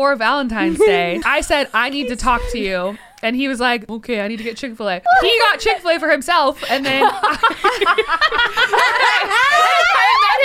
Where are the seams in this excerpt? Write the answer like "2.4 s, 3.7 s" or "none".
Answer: 1.2 s, 3.9 s, 5.0 s